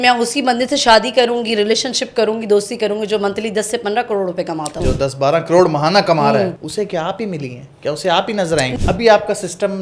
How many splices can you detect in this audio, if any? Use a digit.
2